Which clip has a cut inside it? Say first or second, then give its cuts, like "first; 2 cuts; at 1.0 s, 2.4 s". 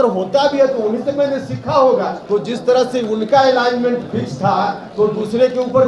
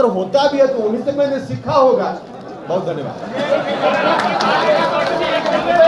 first; 2 cuts; at 2.2 s, 4.8 s